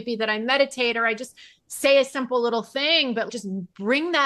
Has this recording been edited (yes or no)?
no